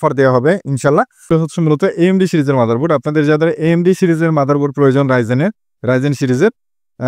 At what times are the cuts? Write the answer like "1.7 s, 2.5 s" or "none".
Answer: 1.3 s